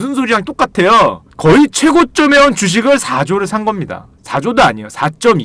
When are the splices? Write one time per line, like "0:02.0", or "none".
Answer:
none